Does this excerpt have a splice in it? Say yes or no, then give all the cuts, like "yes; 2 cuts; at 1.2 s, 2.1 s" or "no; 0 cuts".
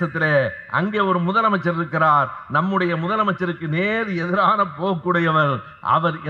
no; 0 cuts